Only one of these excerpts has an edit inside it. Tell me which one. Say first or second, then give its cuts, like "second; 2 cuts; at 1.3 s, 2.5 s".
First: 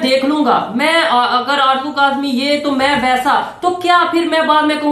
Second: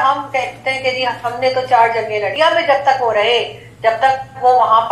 second; 1 cut; at 2.3 s